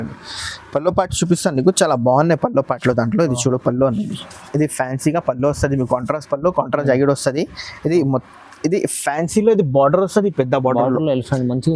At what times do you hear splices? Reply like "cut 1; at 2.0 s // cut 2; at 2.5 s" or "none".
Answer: none